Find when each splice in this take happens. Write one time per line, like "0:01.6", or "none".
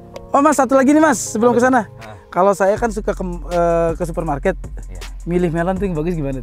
none